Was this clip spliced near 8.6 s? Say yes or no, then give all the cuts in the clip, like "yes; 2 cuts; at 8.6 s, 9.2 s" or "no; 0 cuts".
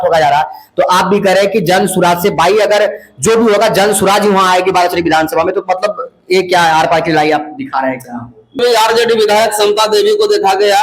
yes; 1 cut; at 8.6 s